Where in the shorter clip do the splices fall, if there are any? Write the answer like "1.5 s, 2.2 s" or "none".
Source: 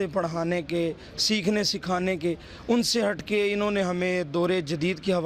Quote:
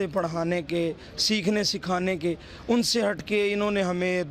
none